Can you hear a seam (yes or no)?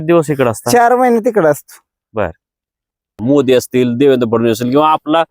yes